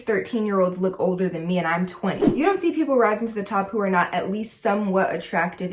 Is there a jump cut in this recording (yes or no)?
yes